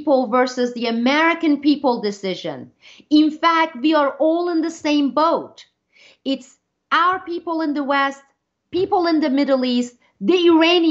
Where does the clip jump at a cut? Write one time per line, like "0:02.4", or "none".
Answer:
none